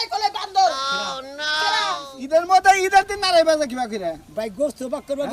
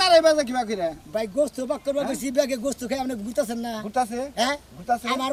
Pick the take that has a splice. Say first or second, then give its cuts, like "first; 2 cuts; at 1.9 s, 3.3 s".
first; 1 cut; at 2.1 s